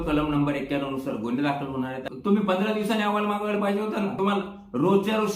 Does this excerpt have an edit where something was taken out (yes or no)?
yes